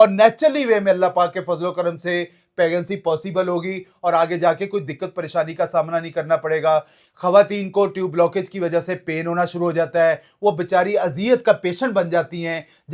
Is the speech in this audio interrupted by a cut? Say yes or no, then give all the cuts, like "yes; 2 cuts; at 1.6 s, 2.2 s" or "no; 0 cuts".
no; 0 cuts